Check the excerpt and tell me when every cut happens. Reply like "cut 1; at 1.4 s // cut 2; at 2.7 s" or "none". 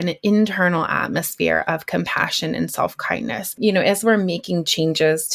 cut 1; at 3.5 s